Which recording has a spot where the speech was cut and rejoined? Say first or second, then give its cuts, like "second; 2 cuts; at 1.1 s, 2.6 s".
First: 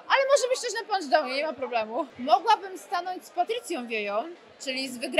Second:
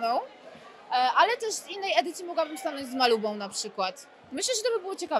first; 1 cut; at 2.1 s